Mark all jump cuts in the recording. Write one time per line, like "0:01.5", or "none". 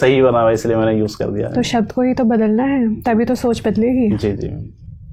none